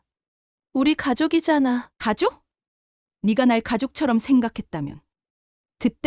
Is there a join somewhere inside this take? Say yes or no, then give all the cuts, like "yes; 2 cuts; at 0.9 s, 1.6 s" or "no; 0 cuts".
yes; 1 cut; at 1.9 s